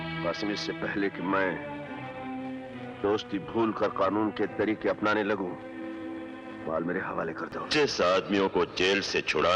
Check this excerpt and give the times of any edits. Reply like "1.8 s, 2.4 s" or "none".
7.6 s